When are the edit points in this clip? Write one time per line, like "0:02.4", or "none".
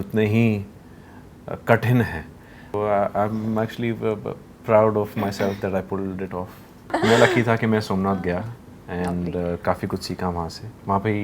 0:02.7
0:06.9

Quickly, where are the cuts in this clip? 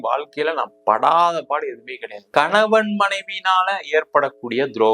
0:02.2

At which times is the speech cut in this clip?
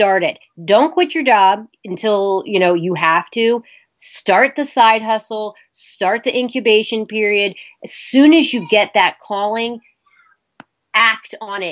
0:01.7

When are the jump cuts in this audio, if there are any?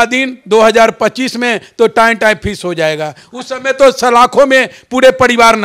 none

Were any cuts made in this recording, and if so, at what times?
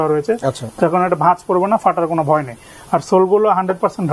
none

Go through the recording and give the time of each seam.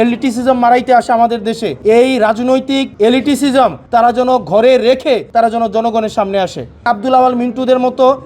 0:01.7
0:02.9
0:03.8
0:05.3
0:06.8

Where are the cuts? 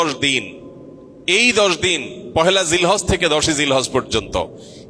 none

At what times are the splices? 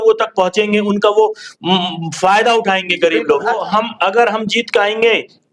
0:03.6

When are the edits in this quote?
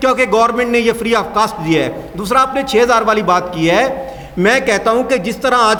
none

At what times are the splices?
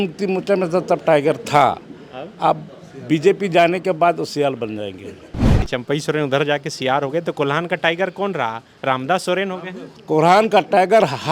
0:05.6

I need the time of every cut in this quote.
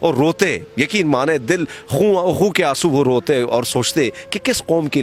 none

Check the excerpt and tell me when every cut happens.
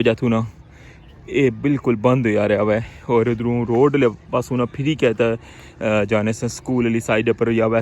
none

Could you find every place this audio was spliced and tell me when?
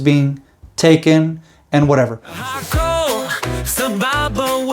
0:02.3

